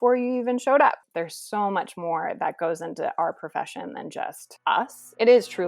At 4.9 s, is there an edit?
yes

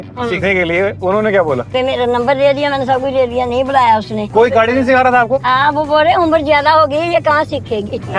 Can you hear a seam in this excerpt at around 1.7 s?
yes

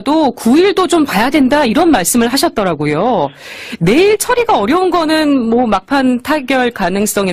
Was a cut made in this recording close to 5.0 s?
yes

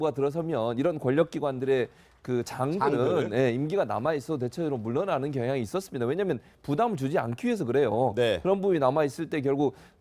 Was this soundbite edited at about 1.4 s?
yes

